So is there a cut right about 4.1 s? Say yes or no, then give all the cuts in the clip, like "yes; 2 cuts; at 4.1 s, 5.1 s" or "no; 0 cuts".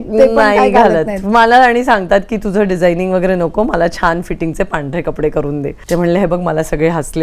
no; 1 cut; at 5.7 s